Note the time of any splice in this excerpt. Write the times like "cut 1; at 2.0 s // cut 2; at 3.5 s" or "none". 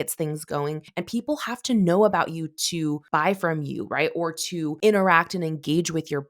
cut 1; at 0.8 s // cut 2; at 3.0 s // cut 3; at 4.8 s